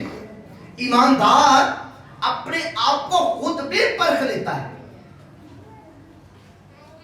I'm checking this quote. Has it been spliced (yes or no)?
no